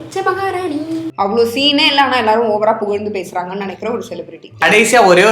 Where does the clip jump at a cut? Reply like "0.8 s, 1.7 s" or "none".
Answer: 1.1 s, 4.6 s